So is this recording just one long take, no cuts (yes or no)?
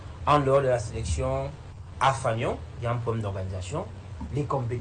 no